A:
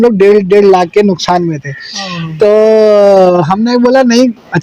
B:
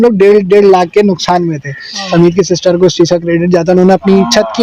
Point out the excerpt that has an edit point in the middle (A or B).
B